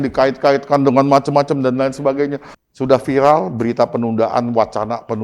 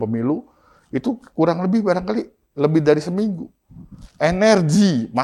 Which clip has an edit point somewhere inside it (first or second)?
first